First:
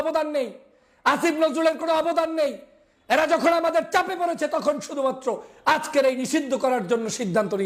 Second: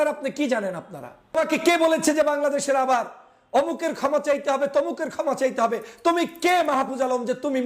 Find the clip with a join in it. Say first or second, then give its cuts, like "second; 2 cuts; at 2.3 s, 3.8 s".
second; 1 cut; at 1.3 s